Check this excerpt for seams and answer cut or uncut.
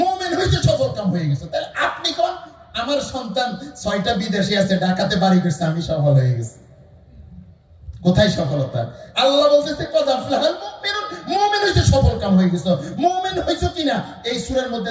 uncut